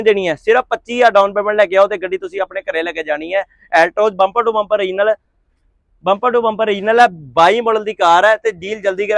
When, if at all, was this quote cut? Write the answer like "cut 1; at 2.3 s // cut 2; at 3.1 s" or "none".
none